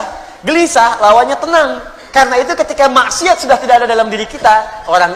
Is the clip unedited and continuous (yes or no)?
yes